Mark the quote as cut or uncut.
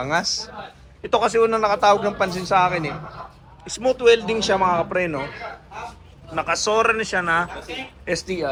uncut